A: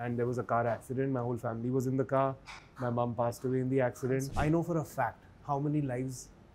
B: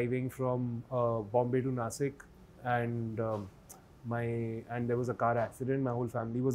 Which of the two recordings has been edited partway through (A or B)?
A